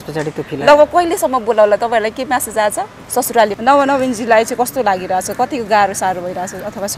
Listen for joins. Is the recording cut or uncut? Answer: cut